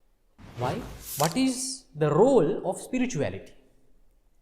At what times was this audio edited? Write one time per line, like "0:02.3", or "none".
0:01.0